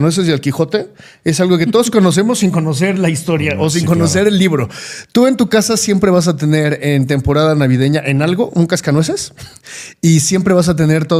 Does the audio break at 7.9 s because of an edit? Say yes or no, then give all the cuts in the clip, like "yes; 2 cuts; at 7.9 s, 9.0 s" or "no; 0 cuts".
no; 0 cuts